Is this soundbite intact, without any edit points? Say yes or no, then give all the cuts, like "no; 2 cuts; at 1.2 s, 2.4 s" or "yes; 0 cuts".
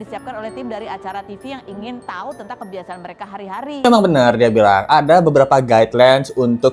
no; 1 cut; at 3.9 s